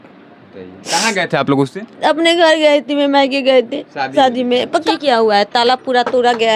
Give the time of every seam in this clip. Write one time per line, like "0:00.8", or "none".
0:04.9